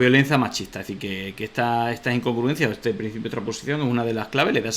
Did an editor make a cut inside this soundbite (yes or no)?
no